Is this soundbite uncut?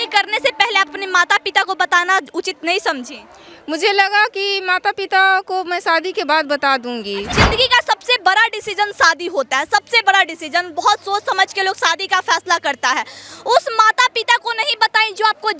no; 1 cut; at 7.4 s

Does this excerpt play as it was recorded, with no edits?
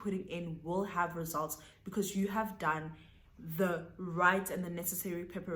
yes; 0 cuts

